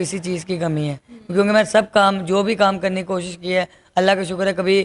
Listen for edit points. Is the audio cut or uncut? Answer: uncut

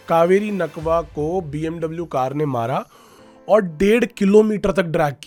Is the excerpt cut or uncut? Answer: uncut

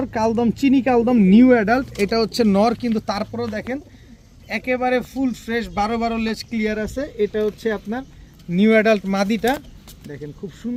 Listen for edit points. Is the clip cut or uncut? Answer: uncut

